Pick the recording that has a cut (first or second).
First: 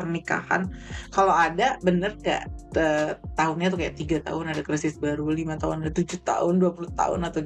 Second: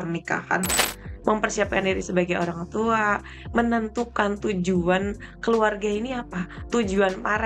second